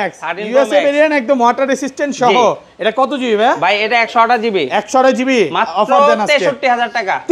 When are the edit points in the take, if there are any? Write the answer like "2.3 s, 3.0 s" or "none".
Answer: none